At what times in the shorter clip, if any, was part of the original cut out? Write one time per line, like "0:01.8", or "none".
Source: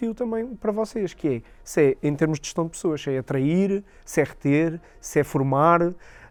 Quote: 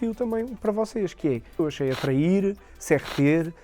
0:01.5